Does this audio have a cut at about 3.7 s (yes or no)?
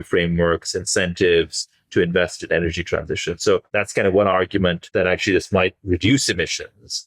yes